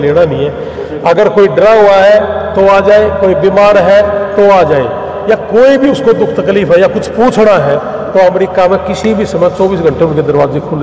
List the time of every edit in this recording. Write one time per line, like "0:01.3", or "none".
none